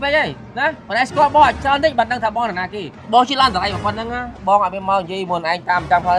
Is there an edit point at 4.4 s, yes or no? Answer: no